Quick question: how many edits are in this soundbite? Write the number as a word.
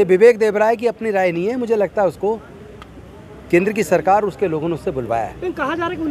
zero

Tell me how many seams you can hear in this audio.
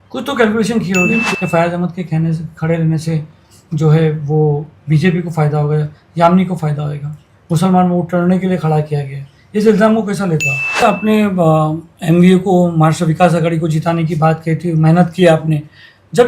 two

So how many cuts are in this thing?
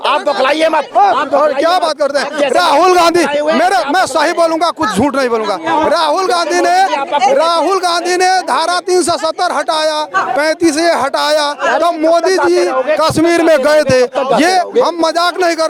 zero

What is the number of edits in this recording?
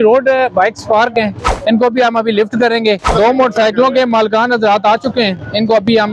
two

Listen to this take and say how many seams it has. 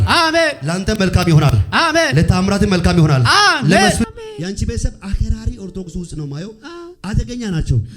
one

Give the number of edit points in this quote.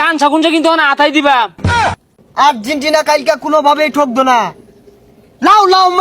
one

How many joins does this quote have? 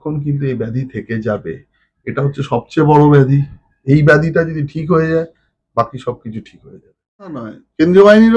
one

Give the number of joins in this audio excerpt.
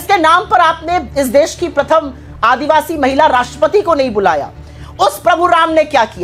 zero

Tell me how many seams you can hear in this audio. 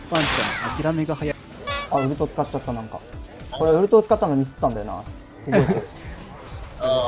one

